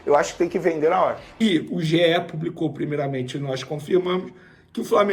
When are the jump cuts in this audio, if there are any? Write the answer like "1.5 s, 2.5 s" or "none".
1.3 s

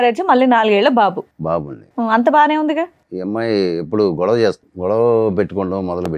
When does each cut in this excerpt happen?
3.0 s, 4.7 s

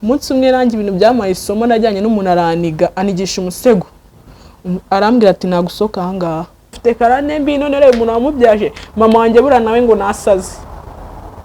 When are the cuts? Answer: 6.7 s

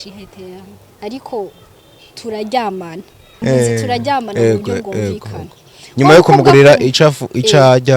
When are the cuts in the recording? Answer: 3.4 s

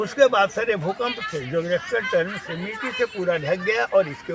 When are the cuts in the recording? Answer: none

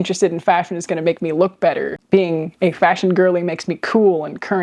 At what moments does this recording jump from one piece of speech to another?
2.0 s

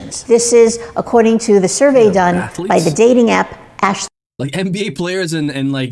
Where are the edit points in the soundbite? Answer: none

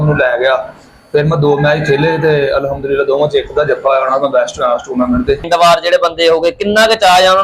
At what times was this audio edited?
5.4 s

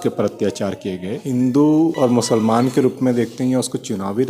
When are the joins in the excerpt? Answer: 1.2 s, 1.9 s

